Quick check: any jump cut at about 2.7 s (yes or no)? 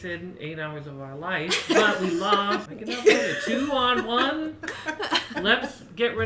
yes